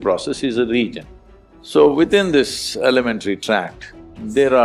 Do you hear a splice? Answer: yes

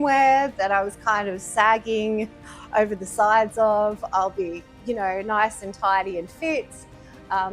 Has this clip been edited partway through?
no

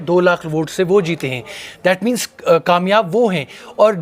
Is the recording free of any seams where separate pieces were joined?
yes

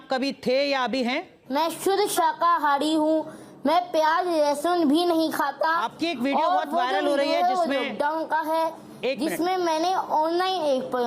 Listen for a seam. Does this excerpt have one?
yes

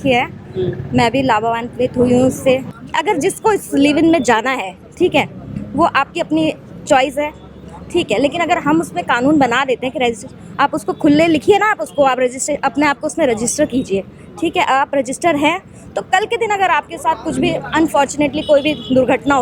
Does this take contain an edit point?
yes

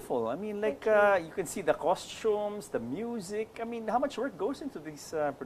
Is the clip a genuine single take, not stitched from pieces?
yes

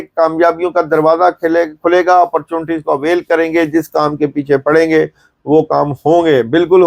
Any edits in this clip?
no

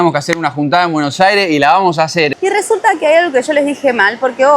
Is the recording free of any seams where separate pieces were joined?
no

